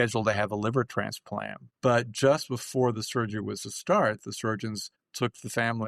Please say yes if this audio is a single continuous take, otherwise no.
no